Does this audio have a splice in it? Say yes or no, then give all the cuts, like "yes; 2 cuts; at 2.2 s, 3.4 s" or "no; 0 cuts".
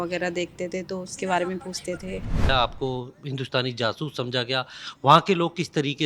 yes; 1 cut; at 2.5 s